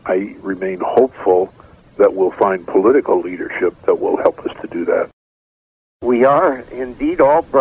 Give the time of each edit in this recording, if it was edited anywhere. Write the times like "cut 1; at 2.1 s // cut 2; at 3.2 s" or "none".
cut 1; at 5.7 s